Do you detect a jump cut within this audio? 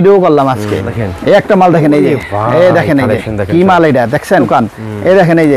yes; 2 cuts; at 1.0 s, 4.5 s

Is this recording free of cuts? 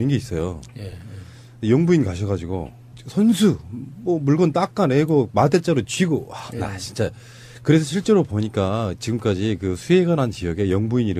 yes; 0 cuts

